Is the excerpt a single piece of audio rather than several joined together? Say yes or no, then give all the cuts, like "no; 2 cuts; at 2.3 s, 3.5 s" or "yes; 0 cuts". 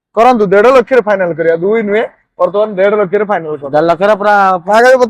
yes; 0 cuts